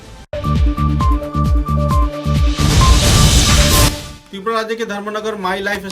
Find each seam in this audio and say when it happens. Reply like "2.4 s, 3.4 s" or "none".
4.1 s